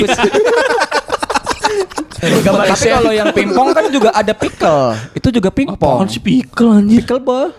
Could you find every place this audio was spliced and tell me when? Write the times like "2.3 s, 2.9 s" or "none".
2.6 s